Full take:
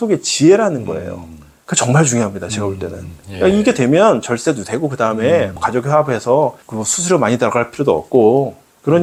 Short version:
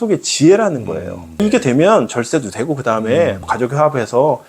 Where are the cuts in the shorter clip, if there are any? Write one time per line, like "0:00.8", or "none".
0:01.4